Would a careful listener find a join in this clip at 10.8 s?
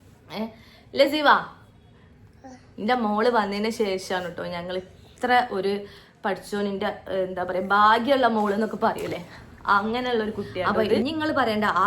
yes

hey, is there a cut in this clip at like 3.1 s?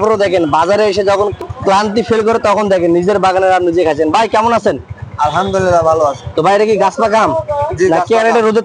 no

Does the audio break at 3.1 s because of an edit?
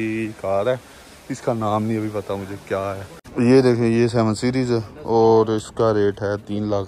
yes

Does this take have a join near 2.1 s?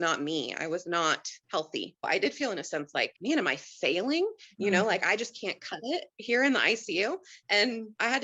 yes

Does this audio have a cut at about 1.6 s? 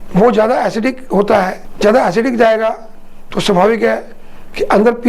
yes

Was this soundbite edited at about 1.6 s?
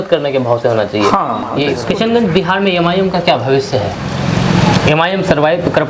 yes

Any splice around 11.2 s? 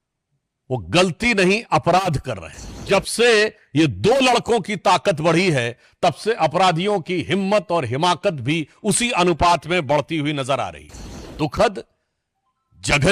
yes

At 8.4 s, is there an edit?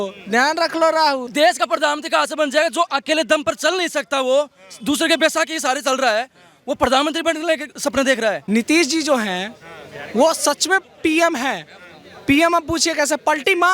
yes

